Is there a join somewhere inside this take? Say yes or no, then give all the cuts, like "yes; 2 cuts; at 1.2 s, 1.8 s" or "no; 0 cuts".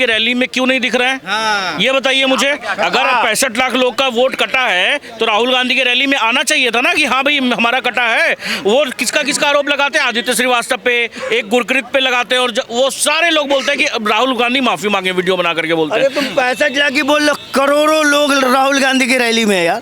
no; 0 cuts